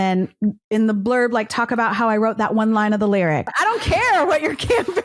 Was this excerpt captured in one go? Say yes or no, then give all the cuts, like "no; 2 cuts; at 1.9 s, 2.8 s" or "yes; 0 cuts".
no; 1 cut; at 3.5 s